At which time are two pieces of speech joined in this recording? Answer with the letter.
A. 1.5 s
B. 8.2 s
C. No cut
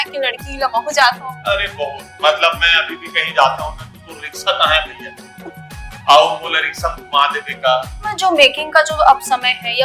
B